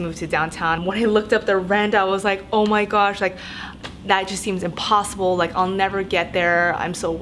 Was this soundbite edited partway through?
no; 0 cuts

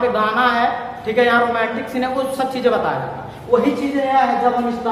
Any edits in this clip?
no; 0 cuts

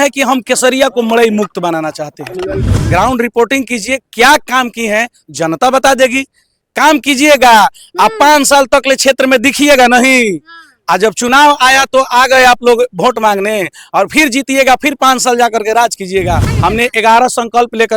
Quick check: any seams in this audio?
yes; 2 cuts; at 2.7 s, 16.5 s

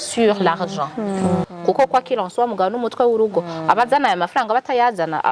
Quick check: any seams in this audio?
yes; 1 cut; at 1.5 s

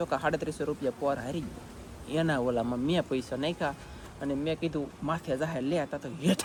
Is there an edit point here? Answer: no; 0 cuts

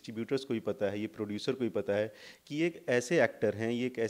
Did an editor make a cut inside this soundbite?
no; 0 cuts

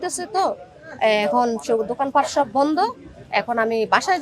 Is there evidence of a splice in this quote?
no; 0 cuts

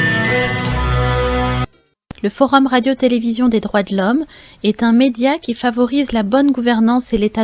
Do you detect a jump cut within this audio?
yes; 1 cut; at 1.6 s

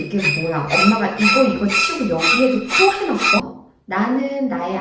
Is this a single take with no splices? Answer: no; 1 cut; at 3.4 s

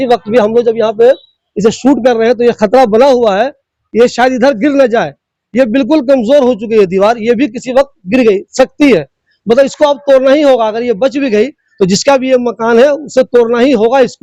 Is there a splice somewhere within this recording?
no; 0 cuts

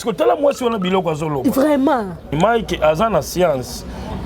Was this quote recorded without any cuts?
no; 1 cut; at 2.3 s

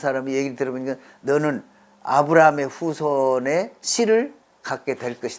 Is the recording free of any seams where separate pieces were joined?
no; 1 cut; at 4.5 s

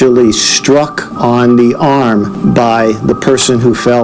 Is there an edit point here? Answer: yes; 2 cuts; at 1.0 s, 2.3 s

